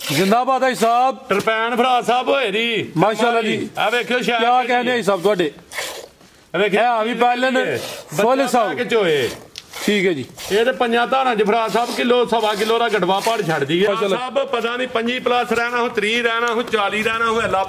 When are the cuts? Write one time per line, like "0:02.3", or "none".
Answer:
0:13.9